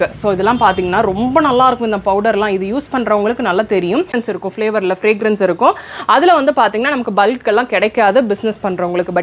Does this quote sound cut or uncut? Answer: cut